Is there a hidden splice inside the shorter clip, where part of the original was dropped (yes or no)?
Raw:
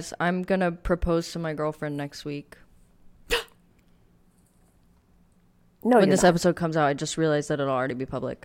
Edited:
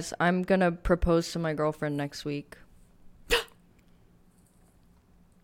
no